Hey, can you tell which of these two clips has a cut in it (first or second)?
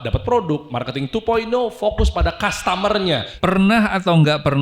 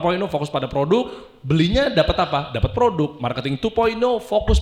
first